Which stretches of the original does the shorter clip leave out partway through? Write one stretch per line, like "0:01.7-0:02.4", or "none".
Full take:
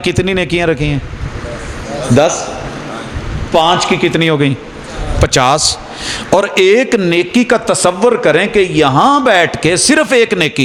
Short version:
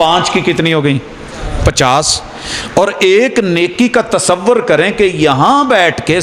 none